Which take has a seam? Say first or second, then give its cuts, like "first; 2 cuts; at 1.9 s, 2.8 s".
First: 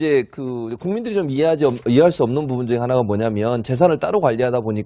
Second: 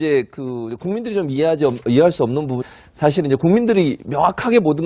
first; 1 cut; at 2.7 s